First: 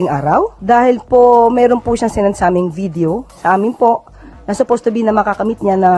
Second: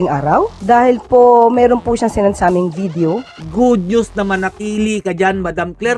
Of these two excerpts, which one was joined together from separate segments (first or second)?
second